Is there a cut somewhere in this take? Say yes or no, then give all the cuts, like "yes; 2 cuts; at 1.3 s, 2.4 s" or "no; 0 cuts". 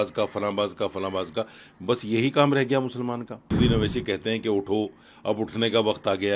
yes; 1 cut; at 3.5 s